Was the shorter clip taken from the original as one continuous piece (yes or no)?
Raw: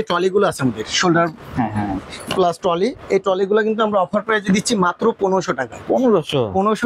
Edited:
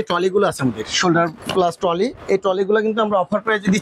no